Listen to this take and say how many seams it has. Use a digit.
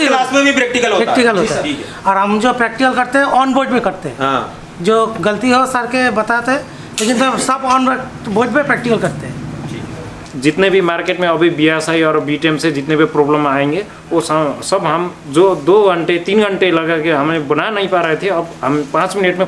1